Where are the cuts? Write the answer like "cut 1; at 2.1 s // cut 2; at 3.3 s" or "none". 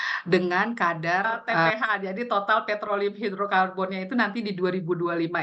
cut 1; at 1.7 s